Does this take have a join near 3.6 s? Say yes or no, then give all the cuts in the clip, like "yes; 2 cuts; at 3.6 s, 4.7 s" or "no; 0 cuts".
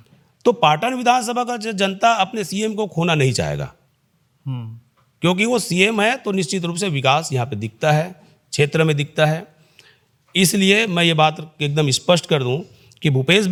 no; 0 cuts